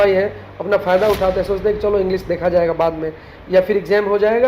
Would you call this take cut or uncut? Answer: uncut